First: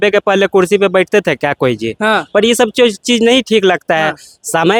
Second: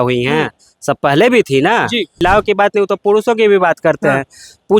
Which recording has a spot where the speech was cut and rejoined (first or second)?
second